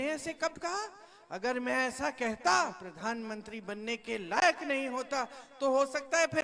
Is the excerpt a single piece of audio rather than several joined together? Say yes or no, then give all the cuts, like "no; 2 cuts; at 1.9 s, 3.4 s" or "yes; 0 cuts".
no; 1 cut; at 2.9 s